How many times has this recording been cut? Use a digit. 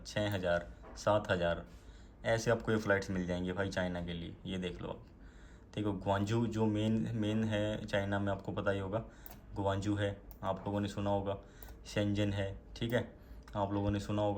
0